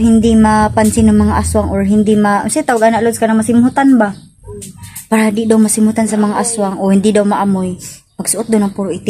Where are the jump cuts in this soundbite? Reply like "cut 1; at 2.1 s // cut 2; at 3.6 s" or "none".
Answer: none